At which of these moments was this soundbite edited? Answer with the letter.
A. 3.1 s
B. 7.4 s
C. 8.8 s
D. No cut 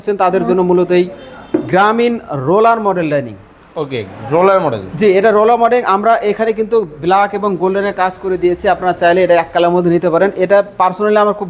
D